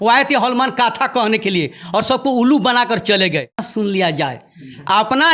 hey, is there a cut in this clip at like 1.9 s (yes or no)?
no